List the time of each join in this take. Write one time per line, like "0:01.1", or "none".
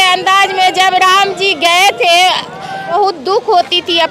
0:02.9